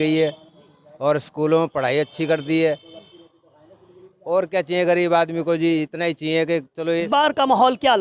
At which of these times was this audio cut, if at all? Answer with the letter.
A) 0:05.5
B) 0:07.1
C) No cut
B